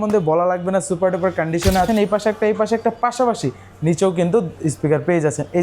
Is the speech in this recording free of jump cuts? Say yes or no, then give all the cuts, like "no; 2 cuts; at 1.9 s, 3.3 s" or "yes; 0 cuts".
no; 1 cut; at 1.9 s